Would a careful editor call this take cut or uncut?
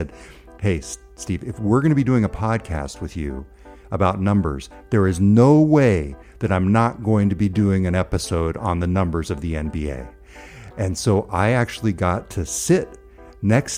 uncut